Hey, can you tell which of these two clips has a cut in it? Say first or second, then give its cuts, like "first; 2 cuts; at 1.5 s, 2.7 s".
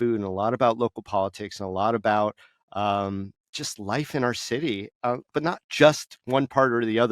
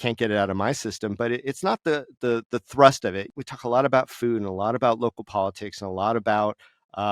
second; 1 cut; at 3.3 s